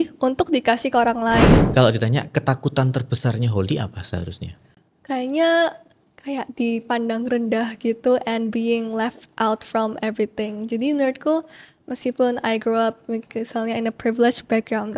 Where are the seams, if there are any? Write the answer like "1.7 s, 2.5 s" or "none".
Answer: 1.6 s